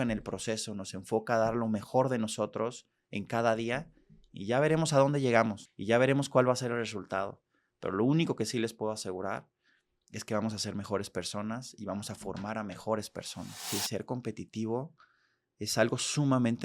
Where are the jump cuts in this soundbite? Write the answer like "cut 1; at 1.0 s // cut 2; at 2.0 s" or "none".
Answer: cut 1; at 5.7 s // cut 2; at 13.7 s